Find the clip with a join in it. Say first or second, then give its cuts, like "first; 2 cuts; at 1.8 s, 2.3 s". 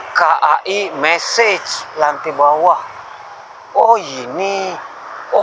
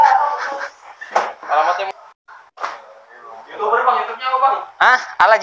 second; 1 cut; at 1.9 s